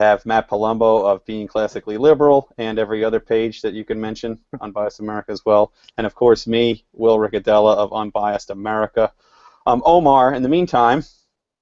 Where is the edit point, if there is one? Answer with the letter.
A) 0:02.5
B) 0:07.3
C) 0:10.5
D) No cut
C